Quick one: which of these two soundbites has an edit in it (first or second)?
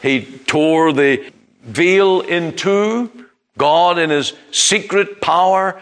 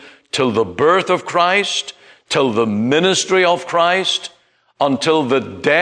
first